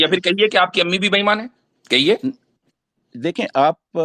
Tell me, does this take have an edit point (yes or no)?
no